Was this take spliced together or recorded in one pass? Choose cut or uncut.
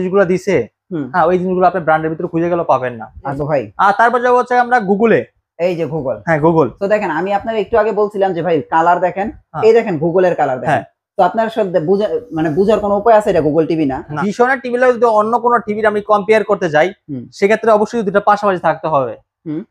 cut